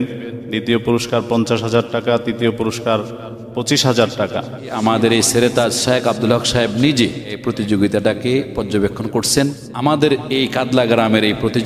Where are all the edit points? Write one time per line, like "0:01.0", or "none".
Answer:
0:04.8
0:07.4
0:09.6